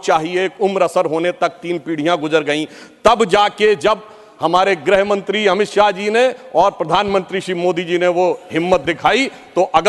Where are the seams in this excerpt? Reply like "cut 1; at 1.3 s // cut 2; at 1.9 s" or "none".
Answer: none

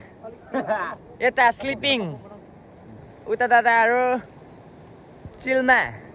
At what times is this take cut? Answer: none

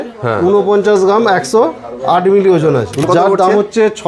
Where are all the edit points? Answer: cut 1; at 3.0 s

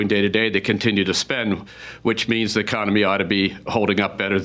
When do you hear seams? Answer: none

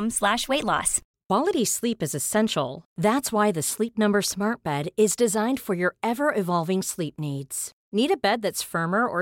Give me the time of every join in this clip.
cut 1; at 1.1 s

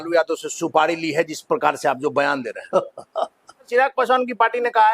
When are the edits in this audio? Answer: cut 1; at 3.7 s

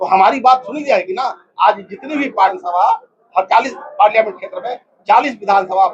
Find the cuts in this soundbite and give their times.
cut 1; at 2.6 s

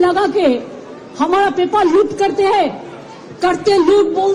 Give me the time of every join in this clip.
none

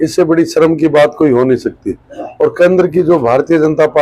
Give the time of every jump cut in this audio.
none

